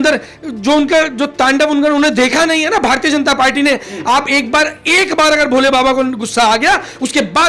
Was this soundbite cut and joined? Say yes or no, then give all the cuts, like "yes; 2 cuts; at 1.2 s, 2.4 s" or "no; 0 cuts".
no; 0 cuts